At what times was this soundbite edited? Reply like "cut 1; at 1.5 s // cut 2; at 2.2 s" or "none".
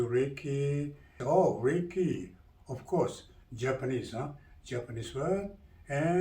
cut 1; at 1.2 s